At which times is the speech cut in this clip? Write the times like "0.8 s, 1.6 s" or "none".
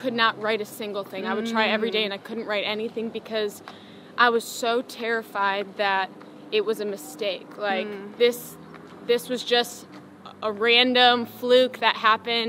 none